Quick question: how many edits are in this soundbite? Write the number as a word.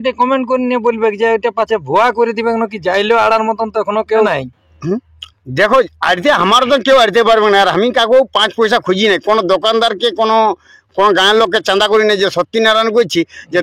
one